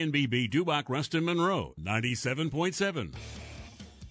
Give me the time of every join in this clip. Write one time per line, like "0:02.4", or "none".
0:03.2